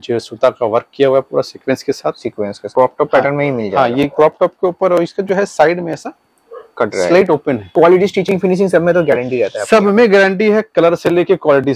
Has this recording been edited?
yes; 2 cuts; at 2.7 s, 7.7 s

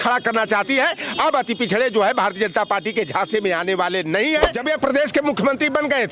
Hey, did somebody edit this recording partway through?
yes; 1 cut; at 4.6 s

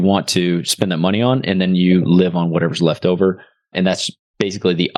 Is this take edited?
no; 0 cuts

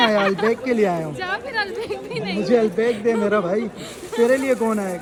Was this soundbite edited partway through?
no; 0 cuts

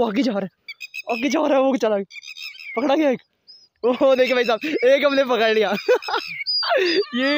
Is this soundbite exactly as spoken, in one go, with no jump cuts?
yes; 0 cuts

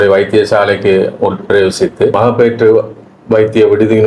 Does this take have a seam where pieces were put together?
yes; 1 cut; at 2.2 s

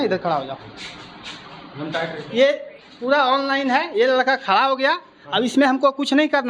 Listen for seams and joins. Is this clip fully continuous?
yes; 0 cuts

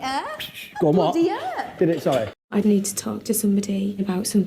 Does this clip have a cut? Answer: yes; 1 cut; at 2.3 s

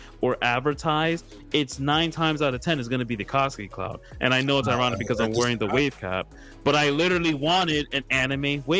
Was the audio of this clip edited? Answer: no; 0 cuts

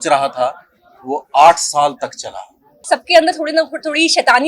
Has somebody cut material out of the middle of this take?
yes; 1 cut; at 2.9 s

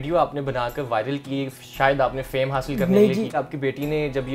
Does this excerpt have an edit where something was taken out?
yes; 1 cut; at 3.3 s

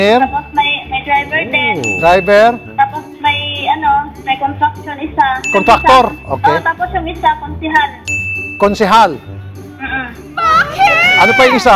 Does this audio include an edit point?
no; 0 cuts

